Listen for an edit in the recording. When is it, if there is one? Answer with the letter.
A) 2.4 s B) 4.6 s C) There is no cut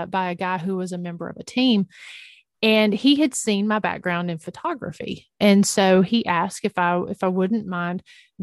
C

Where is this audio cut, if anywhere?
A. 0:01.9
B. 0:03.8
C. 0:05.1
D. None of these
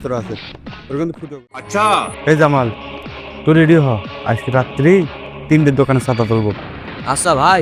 A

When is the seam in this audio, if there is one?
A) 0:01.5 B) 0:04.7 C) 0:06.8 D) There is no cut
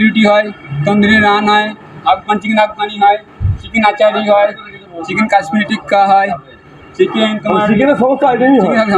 D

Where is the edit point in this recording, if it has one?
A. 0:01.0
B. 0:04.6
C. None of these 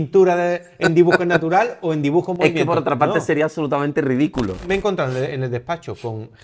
B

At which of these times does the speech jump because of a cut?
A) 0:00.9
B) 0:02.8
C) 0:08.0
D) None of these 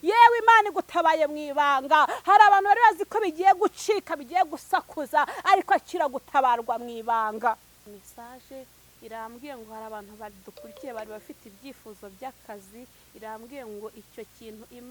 C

